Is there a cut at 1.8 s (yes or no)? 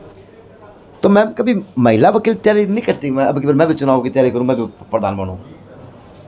no